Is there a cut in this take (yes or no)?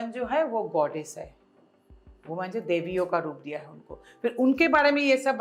no